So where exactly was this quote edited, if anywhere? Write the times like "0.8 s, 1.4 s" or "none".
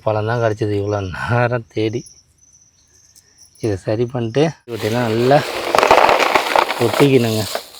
4.8 s